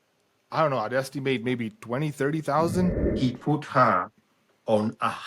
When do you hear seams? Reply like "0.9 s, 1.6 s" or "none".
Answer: 3.0 s

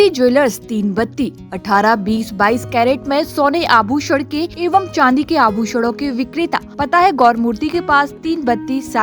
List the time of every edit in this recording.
4.5 s, 6.7 s

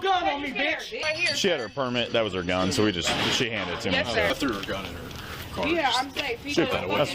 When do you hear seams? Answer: 1.0 s

